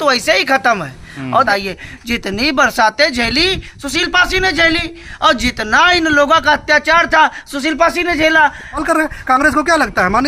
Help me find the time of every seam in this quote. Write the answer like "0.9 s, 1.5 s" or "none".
1.5 s, 8.8 s